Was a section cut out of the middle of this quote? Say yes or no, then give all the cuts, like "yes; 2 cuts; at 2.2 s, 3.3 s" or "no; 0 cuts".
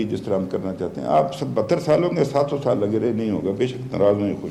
no; 0 cuts